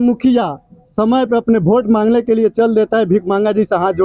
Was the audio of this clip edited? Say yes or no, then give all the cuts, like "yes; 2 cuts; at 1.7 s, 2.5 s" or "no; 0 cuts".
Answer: no; 0 cuts